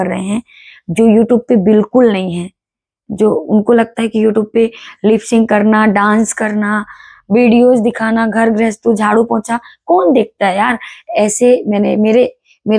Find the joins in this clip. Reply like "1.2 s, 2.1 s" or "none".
none